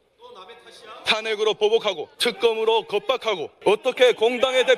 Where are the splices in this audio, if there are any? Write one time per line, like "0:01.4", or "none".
0:02.1
0:03.5